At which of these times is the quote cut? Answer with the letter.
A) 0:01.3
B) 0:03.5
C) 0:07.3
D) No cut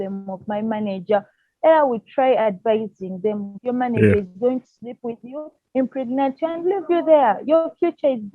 B